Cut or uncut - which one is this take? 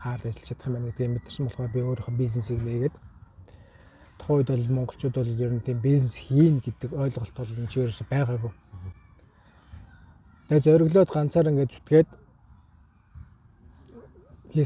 uncut